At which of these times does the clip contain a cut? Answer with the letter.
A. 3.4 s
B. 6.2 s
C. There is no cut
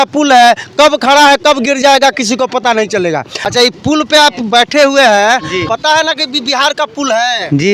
A